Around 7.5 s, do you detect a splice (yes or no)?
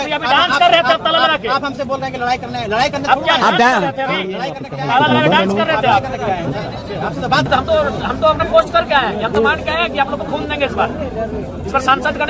yes